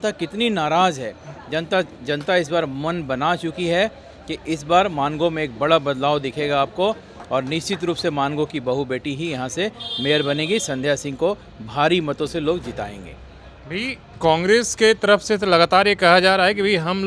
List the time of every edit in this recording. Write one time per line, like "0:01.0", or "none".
none